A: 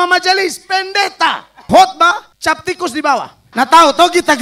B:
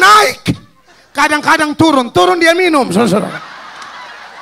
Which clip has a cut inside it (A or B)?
A